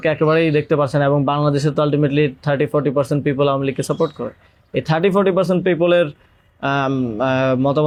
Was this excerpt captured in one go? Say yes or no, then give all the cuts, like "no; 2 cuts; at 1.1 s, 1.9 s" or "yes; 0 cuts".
yes; 0 cuts